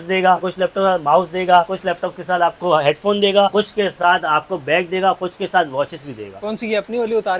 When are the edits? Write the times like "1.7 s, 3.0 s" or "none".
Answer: none